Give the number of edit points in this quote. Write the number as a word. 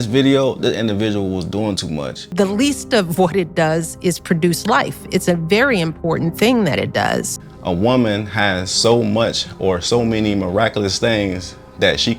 two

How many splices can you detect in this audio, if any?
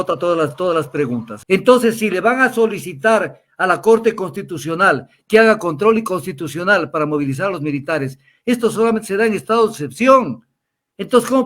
one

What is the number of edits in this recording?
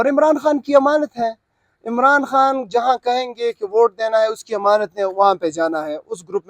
zero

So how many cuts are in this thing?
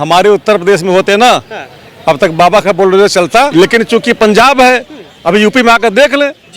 one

